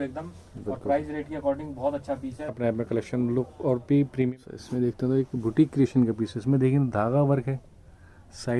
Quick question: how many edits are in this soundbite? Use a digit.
2